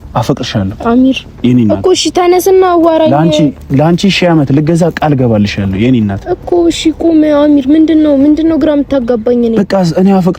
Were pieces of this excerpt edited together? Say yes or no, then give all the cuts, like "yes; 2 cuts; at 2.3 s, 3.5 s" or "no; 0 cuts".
no; 0 cuts